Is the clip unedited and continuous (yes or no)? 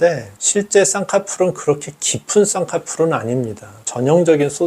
no